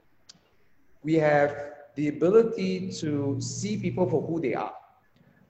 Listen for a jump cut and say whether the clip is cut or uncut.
uncut